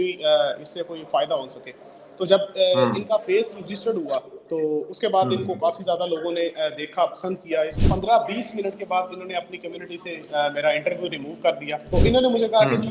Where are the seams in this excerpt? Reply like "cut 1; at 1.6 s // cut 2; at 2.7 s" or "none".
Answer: cut 1; at 7.8 s // cut 2; at 11.8 s